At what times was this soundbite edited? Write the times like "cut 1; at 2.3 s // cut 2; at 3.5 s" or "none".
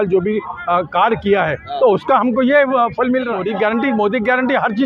cut 1; at 3.4 s